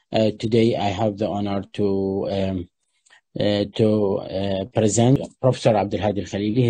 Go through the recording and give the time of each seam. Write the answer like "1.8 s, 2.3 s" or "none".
5.3 s